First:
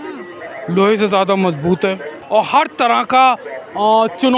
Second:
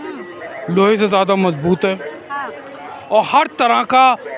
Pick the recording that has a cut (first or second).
first